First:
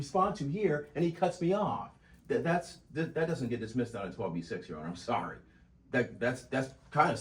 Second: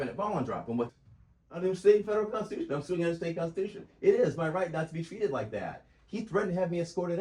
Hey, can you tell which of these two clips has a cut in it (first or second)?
second